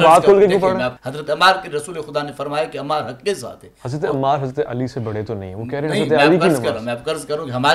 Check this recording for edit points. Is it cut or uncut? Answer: cut